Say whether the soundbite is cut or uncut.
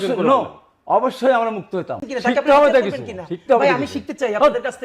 cut